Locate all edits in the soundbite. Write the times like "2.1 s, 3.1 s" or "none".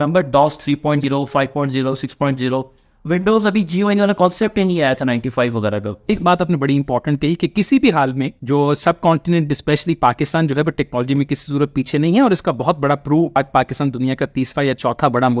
1.0 s, 6.1 s, 8.3 s, 13.4 s